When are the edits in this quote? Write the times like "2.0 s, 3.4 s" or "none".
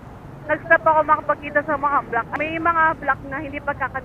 2.3 s